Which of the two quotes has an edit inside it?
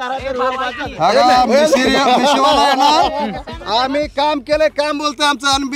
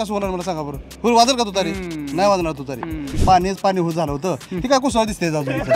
second; 1 cut; at 3.1 s

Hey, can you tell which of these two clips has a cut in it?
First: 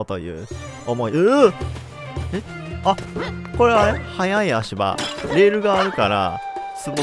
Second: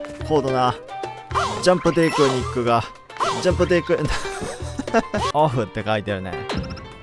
second; 1 cut; at 5.3 s

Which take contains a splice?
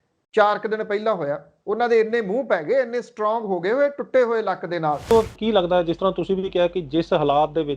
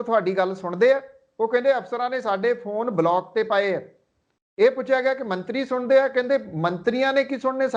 first; 1 cut; at 5.1 s

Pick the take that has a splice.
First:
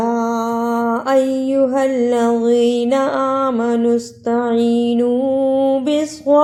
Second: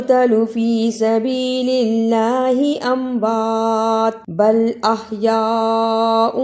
second; 1 cut; at 4.2 s

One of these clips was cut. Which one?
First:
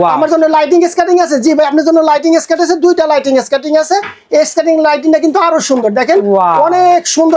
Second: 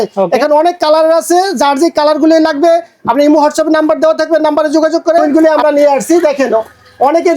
second; 1 cut; at 5.2 s

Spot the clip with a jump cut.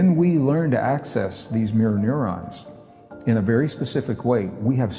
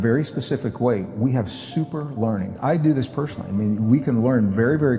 second; 1 cut; at 2.6 s

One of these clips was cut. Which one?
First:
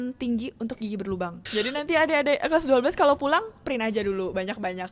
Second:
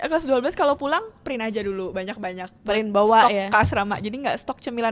first; 1 cut; at 1.4 s

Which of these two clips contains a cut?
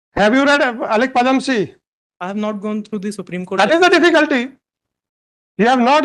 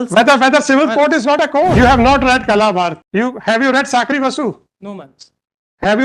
second; 2 cuts; at 1.7 s, 3.0 s

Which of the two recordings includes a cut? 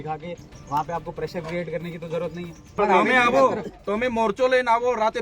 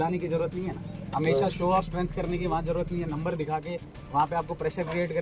first; 1 cut; at 2.7 s

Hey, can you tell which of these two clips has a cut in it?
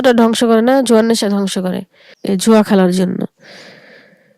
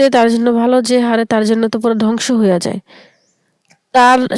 first; 1 cut; at 2.2 s

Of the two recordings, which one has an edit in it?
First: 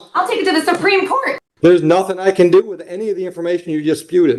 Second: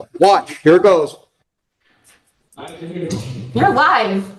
first; 1 cut; at 1.4 s

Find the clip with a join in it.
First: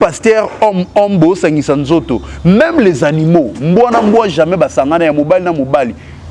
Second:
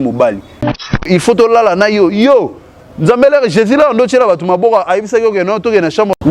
second; 1 cut; at 1.0 s

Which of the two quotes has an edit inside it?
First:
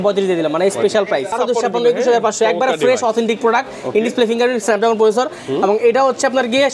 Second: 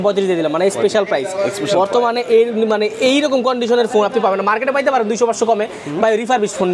first; 1 cut; at 1.4 s

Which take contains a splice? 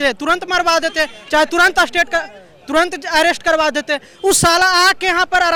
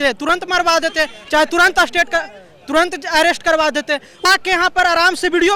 second; 1 cut; at 4.2 s

